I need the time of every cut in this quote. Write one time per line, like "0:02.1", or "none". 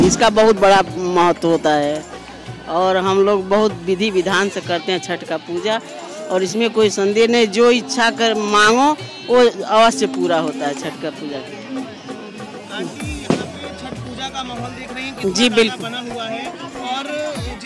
none